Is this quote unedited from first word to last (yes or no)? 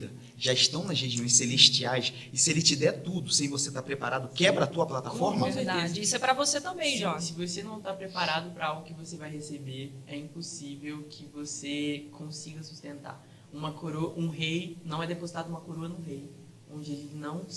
yes